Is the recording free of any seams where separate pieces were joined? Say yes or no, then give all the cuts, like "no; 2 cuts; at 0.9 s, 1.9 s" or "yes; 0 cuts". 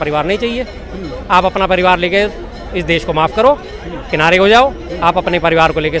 yes; 0 cuts